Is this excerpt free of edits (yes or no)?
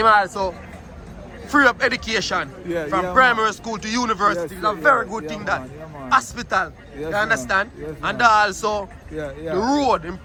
yes